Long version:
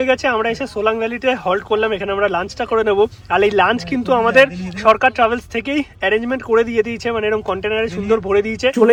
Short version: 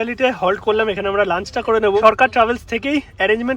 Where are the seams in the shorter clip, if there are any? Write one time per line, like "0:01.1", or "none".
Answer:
0:02.0